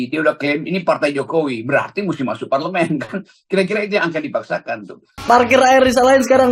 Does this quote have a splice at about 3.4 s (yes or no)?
no